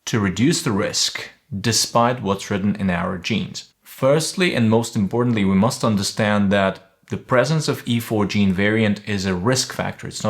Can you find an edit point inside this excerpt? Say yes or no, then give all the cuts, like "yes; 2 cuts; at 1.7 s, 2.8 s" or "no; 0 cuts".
no; 0 cuts